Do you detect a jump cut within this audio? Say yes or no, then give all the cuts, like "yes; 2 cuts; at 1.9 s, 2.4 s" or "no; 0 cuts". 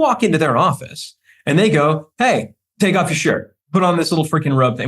yes; 2 cuts; at 2.6 s, 3.5 s